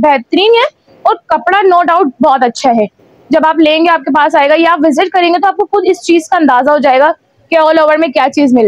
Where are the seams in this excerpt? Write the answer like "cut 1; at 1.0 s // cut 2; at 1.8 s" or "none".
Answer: none